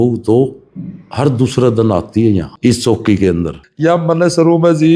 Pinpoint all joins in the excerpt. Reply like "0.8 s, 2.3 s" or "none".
2.5 s, 3.6 s